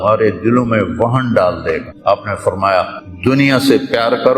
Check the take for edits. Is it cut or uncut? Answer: cut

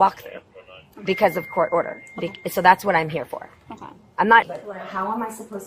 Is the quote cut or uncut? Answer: cut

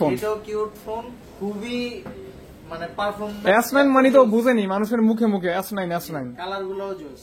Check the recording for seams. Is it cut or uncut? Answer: uncut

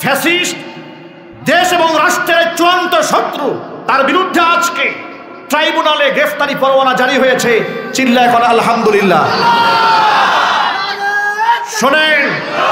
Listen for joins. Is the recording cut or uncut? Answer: uncut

